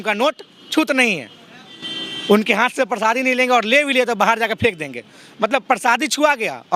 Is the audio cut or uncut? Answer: uncut